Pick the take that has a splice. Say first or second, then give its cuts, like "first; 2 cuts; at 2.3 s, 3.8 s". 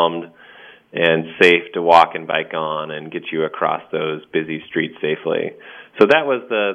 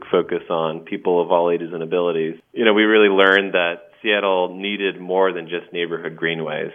second; 1 cut; at 2.4 s